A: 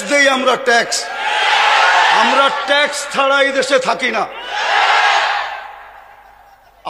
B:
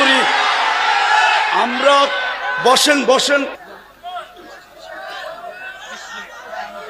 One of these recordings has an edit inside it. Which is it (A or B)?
B